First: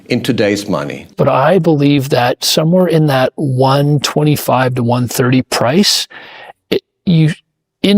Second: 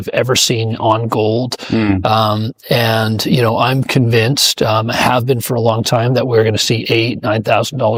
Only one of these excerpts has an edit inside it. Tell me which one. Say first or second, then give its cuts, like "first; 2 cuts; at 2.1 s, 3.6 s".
first; 1 cut; at 1.1 s